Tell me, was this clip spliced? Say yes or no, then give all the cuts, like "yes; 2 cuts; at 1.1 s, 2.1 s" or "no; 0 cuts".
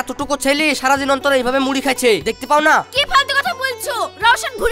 no; 0 cuts